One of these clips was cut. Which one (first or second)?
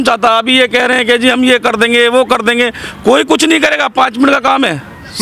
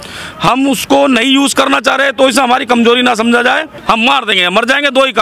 second